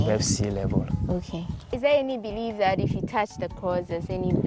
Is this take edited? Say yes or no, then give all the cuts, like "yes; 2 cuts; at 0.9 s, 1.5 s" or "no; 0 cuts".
yes; 1 cut; at 1.7 s